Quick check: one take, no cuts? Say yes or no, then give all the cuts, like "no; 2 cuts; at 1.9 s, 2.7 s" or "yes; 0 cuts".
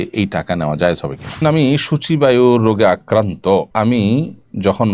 no; 2 cuts; at 1.4 s, 3.7 s